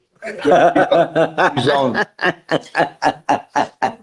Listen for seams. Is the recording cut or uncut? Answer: uncut